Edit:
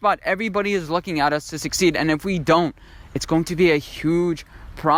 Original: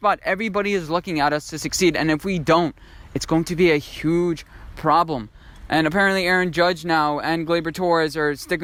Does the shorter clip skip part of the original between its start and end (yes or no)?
no